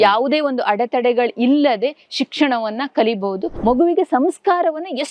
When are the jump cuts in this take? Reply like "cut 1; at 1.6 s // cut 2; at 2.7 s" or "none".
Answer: cut 1; at 3.5 s